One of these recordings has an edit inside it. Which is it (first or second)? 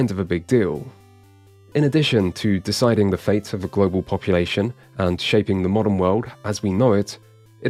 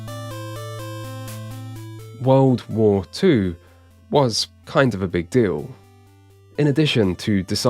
second